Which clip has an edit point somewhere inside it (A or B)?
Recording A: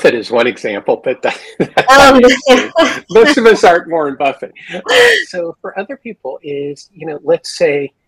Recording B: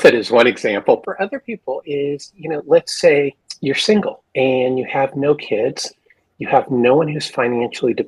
B